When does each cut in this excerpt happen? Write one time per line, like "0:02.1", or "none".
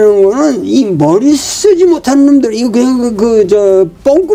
none